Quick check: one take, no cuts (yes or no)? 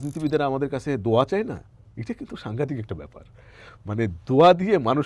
yes